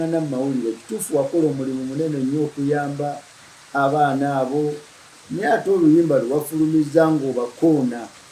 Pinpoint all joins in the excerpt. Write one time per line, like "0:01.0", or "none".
none

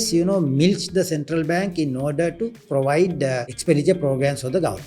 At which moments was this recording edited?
0:02.6
0:03.5

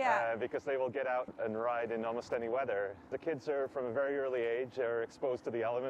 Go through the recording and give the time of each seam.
0:01.3
0:03.1

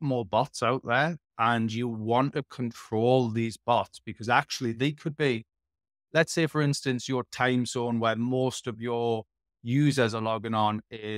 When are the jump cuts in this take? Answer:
none

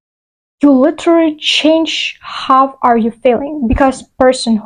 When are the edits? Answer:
none

